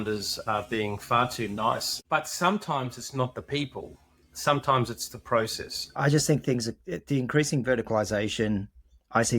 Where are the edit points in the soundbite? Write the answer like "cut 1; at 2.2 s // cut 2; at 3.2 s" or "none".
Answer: cut 1; at 2.0 s // cut 2; at 5.9 s